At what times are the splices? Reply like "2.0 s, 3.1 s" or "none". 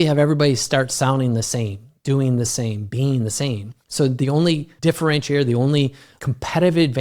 3.8 s, 4.7 s, 6.1 s